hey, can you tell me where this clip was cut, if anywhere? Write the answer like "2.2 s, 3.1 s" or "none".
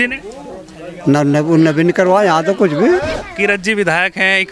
3.2 s